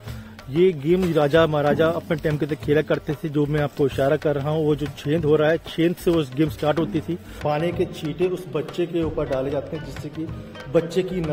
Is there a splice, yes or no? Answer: yes